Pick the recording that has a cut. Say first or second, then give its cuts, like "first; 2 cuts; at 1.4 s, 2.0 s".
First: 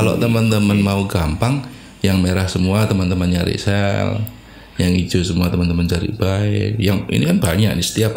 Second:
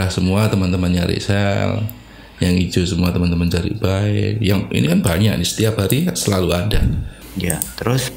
second; 1 cut; at 7.2 s